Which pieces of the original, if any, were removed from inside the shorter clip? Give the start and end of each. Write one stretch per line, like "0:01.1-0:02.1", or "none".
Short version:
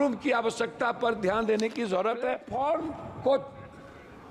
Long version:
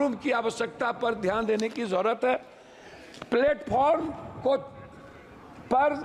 0:02.4-0:03.6